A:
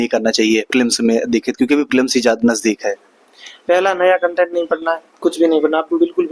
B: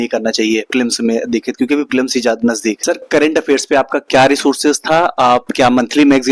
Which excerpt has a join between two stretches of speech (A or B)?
B